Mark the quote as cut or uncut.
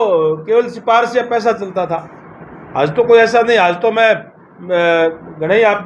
uncut